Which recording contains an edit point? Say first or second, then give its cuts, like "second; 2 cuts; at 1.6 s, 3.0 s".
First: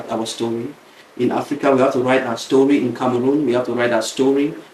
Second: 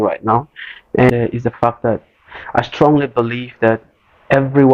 second; 1 cut; at 1.1 s